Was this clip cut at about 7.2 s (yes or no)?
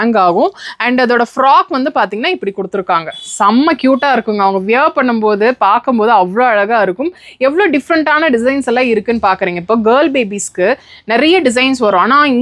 no